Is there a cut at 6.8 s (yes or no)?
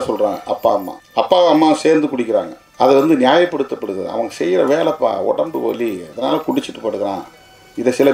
no